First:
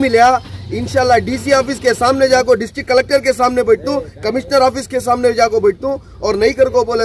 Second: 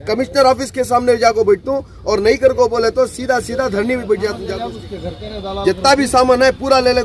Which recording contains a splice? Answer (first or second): second